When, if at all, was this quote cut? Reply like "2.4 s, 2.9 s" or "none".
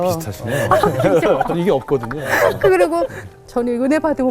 3.2 s